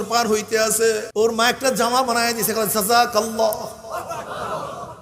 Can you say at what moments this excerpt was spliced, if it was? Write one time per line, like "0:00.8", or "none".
0:01.1